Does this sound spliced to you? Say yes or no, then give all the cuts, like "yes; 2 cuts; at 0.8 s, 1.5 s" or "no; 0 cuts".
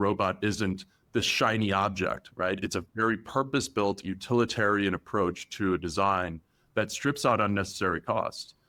no; 0 cuts